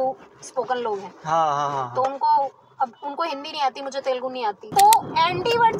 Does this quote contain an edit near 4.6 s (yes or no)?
yes